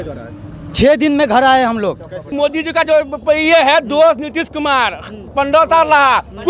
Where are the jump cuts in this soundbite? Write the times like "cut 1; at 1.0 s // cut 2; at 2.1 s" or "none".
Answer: cut 1; at 2.3 s